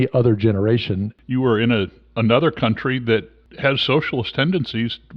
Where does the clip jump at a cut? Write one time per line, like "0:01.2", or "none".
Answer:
0:01.1
0:03.4